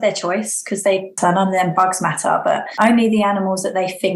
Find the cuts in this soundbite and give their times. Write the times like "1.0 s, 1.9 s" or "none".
1.1 s, 2.7 s